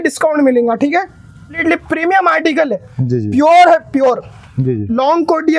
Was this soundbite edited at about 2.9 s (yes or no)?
no